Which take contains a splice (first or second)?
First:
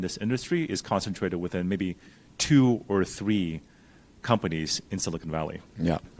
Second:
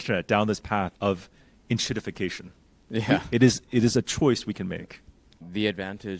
second